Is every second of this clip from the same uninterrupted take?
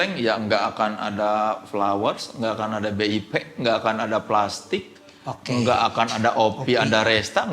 yes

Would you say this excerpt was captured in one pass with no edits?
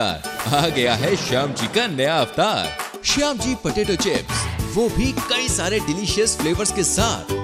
yes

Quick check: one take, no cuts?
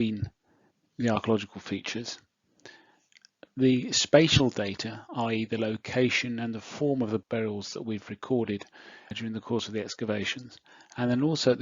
no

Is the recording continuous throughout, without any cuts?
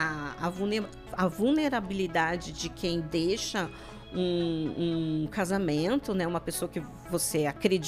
yes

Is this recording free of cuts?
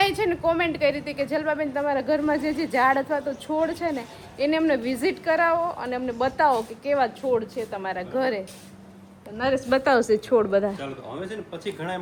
yes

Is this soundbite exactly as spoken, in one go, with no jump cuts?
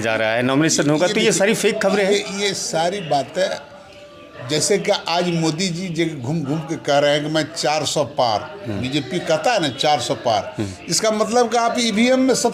yes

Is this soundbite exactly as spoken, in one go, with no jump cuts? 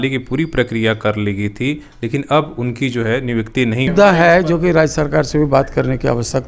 no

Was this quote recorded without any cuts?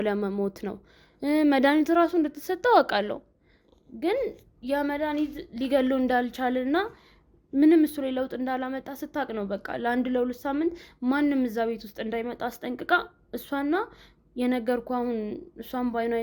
yes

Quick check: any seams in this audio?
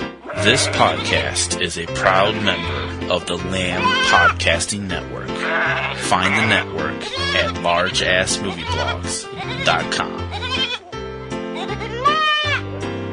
no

